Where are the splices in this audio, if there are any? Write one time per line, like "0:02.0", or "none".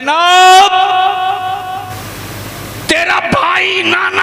0:02.0